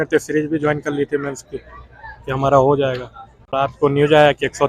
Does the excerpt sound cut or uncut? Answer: cut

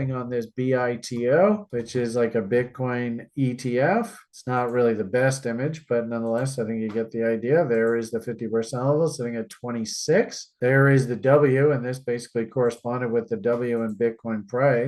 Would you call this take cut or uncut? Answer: uncut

